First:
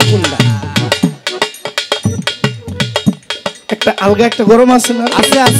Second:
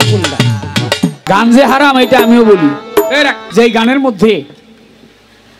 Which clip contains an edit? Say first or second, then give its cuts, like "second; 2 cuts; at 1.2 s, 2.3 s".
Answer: second; 2 cuts; at 1.3 s, 3.4 s